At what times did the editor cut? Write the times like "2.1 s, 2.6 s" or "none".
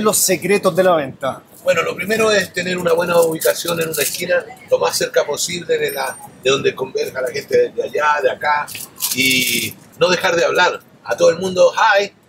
none